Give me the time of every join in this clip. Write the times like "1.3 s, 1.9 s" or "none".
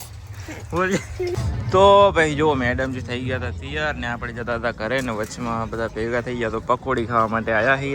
1.4 s